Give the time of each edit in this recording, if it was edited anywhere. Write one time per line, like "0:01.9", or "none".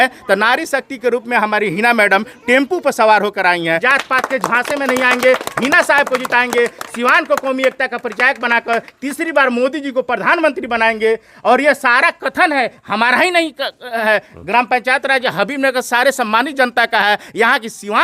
0:03.7